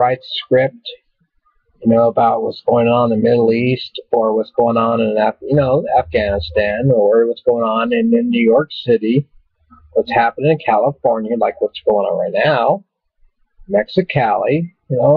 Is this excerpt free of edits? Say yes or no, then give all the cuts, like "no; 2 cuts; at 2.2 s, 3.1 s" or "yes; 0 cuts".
no; 1 cut; at 13.9 s